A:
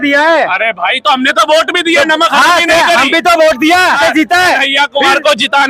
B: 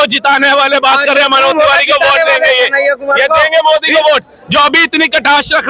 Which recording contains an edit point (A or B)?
A